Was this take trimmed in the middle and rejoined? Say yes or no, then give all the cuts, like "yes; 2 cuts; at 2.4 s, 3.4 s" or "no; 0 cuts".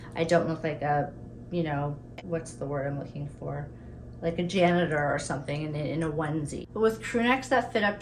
yes; 2 cuts; at 2.1 s, 6.6 s